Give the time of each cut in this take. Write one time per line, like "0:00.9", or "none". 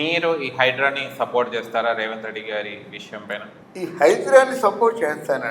0:03.6